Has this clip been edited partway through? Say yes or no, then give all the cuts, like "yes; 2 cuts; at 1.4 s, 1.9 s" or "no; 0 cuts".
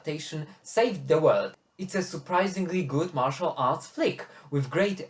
yes; 1 cut; at 1.7 s